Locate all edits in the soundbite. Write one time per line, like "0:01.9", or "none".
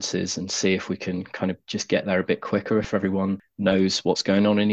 0:03.5